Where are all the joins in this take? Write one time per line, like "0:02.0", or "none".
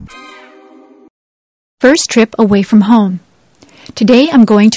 0:01.1